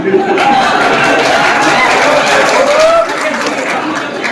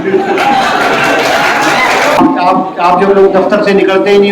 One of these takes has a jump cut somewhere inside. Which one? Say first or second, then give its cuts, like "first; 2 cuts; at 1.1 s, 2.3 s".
second; 1 cut; at 2.2 s